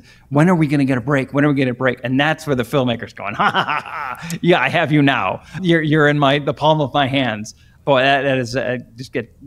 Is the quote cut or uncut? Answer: uncut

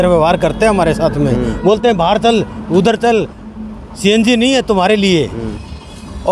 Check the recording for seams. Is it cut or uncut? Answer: uncut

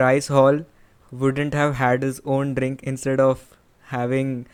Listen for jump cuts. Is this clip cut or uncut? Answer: uncut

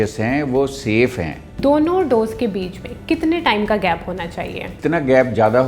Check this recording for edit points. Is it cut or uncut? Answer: cut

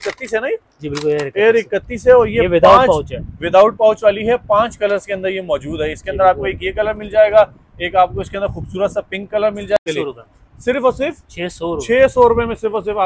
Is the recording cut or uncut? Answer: cut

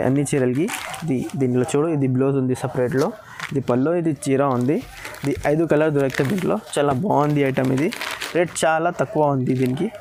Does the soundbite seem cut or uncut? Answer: uncut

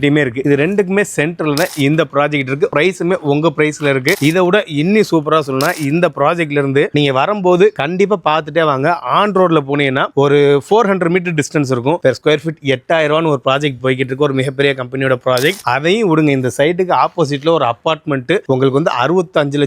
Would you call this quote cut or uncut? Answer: cut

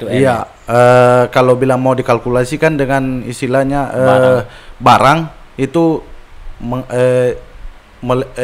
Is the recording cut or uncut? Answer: uncut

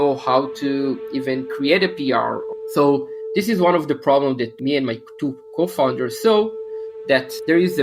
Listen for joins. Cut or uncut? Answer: cut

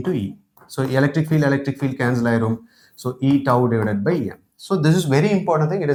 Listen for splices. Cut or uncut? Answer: uncut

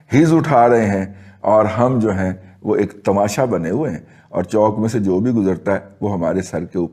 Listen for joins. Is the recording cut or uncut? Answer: uncut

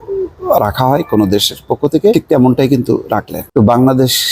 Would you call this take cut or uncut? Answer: cut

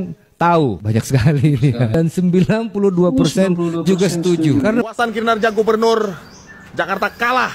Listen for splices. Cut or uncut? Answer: cut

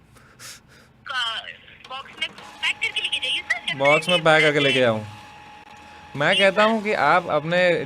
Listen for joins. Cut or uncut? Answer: cut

